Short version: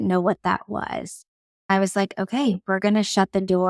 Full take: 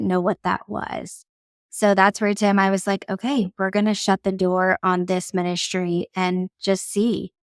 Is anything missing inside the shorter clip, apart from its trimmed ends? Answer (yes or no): yes